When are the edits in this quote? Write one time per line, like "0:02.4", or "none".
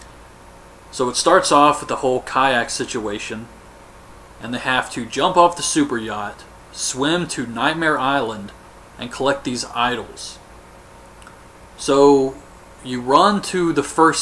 none